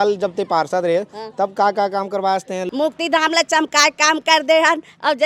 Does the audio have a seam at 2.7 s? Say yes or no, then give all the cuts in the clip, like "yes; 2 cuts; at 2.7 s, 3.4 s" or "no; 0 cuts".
yes; 1 cut; at 2.7 s